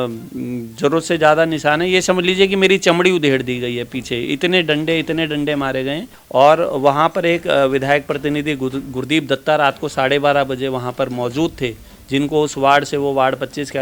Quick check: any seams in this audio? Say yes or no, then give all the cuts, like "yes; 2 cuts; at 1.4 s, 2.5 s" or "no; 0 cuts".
yes; 1 cut; at 6.1 s